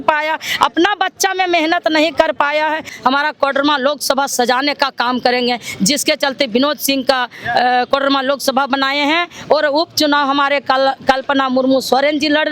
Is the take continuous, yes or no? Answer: no